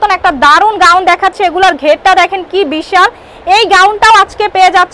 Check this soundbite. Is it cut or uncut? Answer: uncut